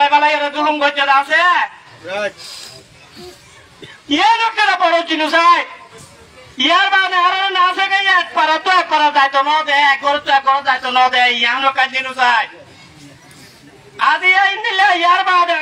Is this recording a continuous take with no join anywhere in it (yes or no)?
yes